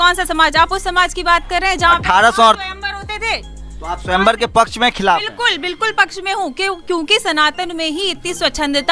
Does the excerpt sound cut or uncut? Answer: cut